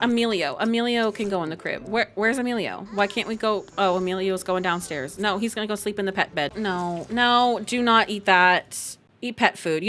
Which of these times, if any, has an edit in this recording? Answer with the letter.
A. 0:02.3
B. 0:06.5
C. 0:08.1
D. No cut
B